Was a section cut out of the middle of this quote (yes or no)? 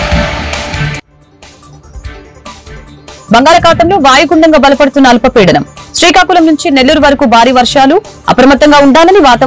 yes